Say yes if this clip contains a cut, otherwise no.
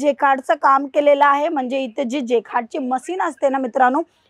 no